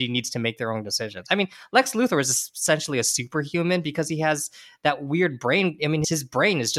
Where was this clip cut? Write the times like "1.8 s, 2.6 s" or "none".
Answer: none